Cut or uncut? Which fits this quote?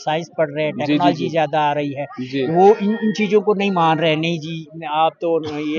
uncut